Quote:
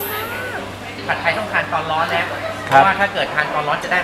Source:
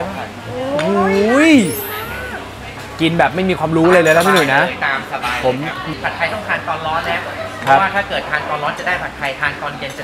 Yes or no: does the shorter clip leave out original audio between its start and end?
yes